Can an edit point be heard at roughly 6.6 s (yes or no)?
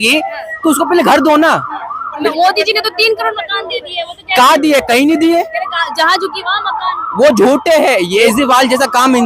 no